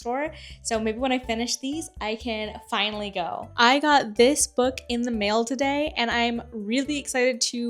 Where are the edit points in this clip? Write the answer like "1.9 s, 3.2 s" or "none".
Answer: 3.3 s